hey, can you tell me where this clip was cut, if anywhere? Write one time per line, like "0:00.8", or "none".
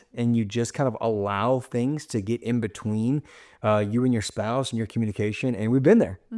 none